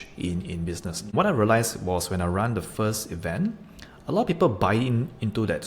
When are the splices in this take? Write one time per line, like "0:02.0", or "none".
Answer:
0:01.1